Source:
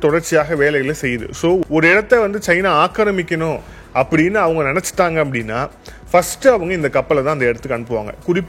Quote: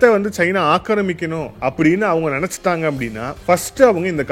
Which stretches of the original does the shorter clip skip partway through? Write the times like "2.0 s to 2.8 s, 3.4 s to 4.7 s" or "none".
3.6 s to 3.8 s, 5.6 s to 5.9 s